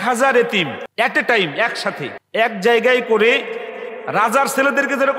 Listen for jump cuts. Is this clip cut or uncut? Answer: cut